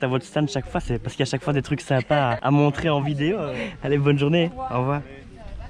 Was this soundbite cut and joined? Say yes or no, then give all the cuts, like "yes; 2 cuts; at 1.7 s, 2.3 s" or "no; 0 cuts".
no; 0 cuts